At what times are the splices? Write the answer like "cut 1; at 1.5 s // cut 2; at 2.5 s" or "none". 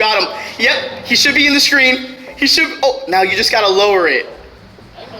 none